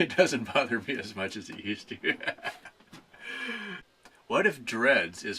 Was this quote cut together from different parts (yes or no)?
yes